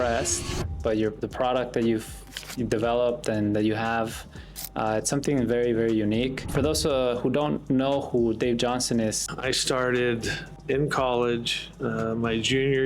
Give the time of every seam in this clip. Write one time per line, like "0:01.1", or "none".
0:09.3